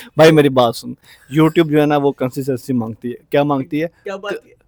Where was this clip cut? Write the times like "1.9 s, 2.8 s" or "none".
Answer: none